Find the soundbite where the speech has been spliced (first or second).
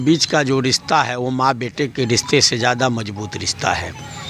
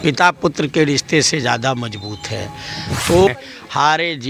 second